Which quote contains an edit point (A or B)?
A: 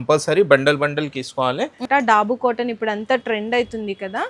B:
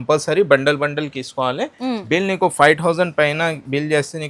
A